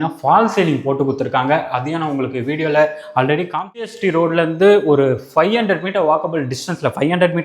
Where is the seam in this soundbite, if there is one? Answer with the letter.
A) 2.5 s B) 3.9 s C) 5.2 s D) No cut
B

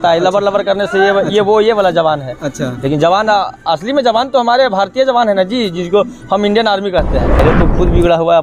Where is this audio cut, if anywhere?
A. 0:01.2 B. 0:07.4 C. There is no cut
B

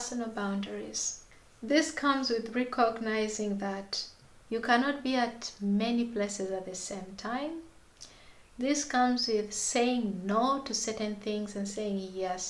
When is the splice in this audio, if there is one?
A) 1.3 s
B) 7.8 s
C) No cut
C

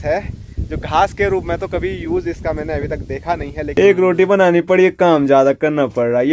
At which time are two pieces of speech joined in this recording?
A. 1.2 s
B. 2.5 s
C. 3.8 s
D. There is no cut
C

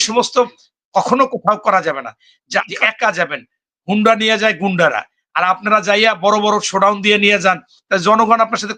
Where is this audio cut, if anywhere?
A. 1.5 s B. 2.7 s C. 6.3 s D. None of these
B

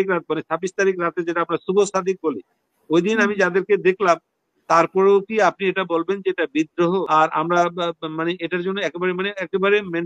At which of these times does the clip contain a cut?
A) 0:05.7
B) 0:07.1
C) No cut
B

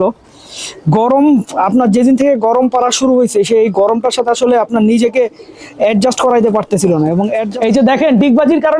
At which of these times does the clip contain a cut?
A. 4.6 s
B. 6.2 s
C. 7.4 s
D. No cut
C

